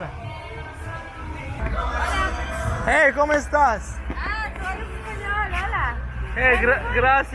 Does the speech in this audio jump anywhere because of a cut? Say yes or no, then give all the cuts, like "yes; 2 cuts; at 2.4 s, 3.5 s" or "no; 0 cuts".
yes; 1 cut; at 1.6 s